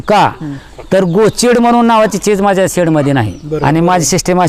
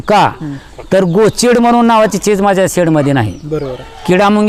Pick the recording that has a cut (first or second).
first